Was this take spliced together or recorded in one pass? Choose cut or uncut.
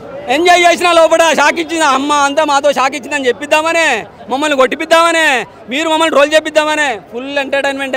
uncut